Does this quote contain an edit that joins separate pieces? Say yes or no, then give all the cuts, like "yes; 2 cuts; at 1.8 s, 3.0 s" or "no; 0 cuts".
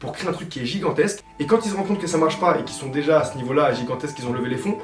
no; 0 cuts